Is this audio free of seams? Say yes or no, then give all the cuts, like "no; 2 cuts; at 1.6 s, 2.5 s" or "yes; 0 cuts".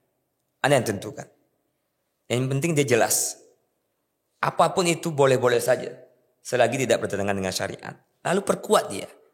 yes; 0 cuts